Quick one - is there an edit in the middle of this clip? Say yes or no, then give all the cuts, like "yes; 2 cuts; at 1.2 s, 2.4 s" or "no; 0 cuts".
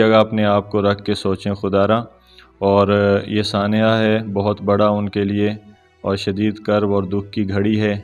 no; 0 cuts